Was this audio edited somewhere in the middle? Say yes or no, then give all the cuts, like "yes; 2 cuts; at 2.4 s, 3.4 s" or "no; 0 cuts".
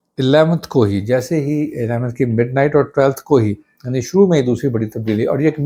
no; 0 cuts